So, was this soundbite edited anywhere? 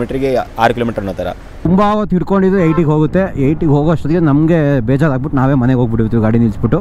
yes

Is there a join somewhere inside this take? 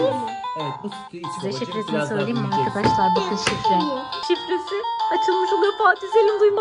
yes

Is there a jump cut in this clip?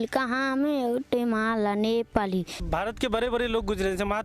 yes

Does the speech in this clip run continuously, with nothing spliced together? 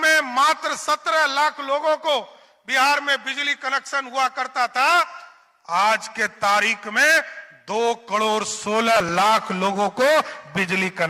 yes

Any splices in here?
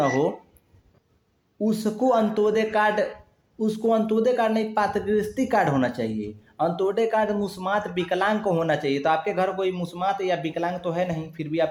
no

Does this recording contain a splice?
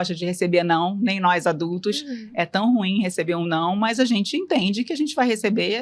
no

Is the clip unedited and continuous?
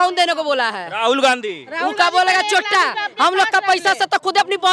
yes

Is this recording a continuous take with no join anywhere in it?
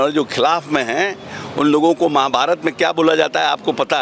yes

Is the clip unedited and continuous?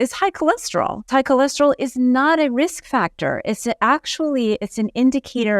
no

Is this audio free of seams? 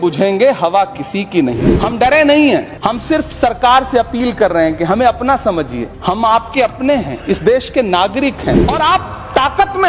no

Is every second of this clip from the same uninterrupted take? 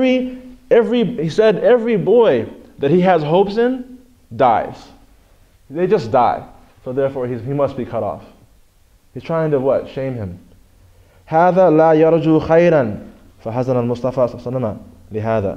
yes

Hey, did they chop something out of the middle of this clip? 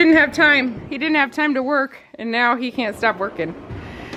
no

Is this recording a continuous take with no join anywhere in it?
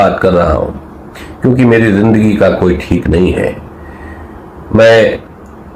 yes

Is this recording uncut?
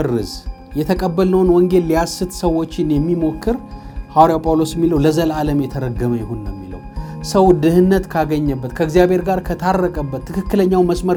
yes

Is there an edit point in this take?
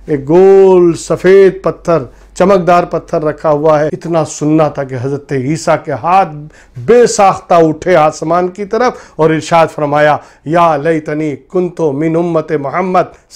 yes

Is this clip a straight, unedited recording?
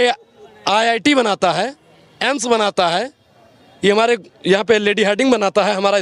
yes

